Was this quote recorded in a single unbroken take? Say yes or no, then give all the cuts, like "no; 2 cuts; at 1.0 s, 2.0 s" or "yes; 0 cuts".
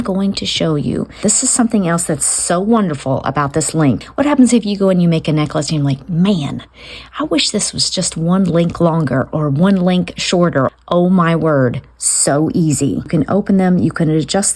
no; 4 cuts; at 1.2 s, 4.0 s, 10.7 s, 13.1 s